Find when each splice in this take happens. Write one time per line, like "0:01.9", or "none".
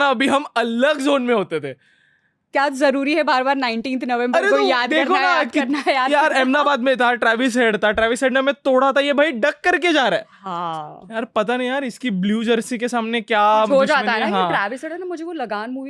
none